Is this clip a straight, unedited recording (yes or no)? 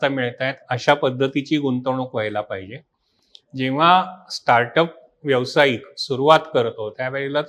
yes